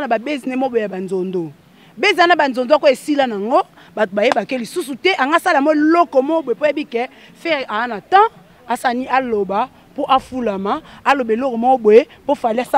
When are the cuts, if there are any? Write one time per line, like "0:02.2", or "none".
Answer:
none